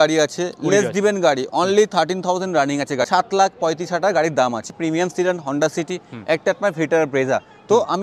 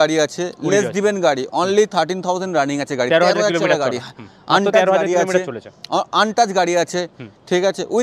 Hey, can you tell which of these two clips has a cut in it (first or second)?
first